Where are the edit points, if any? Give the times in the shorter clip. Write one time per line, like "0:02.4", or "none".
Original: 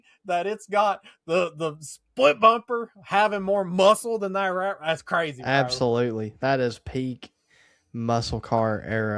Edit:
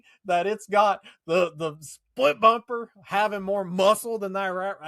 none